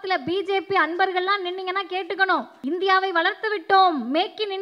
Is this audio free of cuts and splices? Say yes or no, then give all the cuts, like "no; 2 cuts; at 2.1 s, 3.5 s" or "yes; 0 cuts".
no; 1 cut; at 2.5 s